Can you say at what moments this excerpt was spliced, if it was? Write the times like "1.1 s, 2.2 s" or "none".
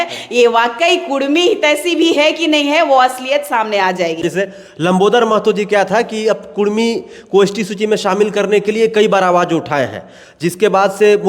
none